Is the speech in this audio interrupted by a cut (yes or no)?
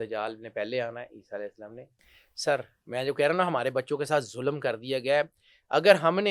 yes